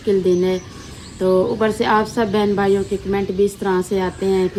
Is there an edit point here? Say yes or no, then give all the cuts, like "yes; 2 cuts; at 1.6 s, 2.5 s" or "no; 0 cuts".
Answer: no; 0 cuts